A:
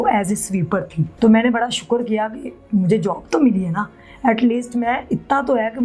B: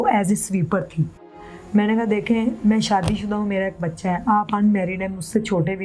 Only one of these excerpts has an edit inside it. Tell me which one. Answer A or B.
B